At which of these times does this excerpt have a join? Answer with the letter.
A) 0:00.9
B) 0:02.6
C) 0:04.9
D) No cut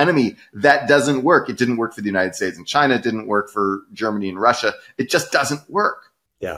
D